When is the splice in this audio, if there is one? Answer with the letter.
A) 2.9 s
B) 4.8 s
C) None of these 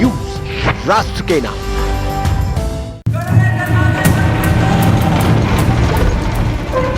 A